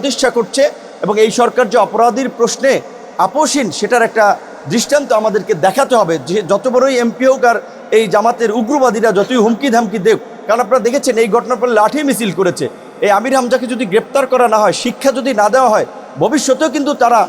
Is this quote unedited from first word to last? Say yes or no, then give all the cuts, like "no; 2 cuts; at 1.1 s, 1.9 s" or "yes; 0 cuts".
yes; 0 cuts